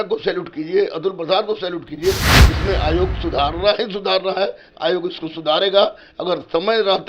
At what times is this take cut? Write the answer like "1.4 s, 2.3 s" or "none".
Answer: 2.4 s